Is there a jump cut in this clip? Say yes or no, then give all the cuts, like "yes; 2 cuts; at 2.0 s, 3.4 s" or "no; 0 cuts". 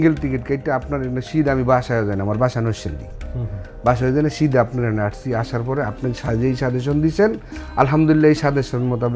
no; 0 cuts